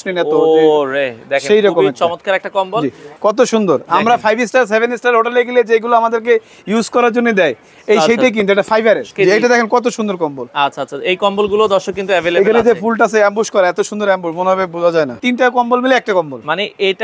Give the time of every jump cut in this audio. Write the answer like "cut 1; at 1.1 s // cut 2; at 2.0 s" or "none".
cut 1; at 3.1 s // cut 2; at 9.1 s // cut 3; at 15.2 s